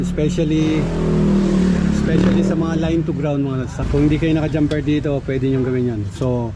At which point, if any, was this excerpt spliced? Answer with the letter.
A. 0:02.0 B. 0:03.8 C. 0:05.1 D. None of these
B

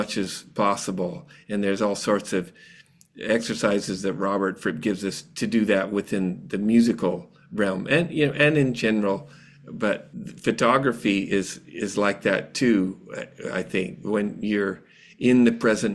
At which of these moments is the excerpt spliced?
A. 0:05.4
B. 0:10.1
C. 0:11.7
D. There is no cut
B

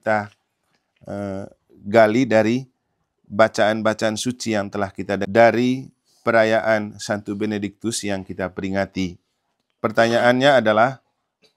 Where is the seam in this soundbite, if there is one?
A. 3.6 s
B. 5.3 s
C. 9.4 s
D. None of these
B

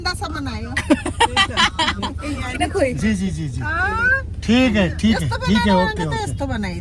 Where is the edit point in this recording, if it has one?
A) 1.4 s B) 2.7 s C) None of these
C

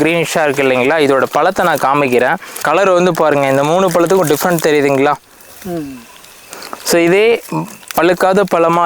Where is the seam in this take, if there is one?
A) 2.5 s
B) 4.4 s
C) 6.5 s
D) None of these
A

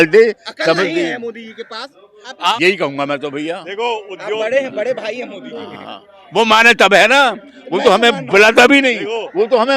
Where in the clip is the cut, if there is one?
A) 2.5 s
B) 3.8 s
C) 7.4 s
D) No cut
A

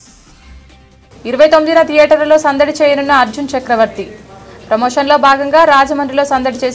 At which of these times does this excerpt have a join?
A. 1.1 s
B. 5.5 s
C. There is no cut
A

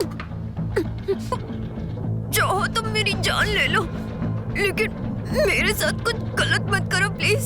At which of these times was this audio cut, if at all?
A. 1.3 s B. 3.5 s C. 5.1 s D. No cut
A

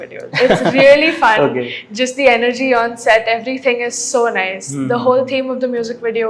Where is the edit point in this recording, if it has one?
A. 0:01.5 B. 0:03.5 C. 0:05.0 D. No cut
D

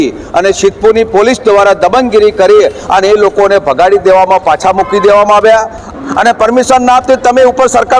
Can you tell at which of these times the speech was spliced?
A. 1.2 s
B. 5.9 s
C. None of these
B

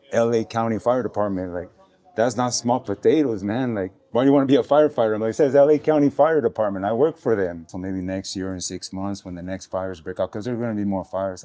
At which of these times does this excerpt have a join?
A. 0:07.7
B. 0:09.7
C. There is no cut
A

